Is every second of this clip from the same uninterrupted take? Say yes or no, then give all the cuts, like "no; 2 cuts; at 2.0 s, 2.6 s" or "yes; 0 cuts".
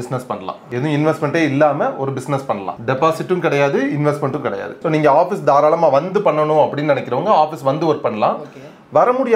no; 2 cuts; at 2.7 s, 4.7 s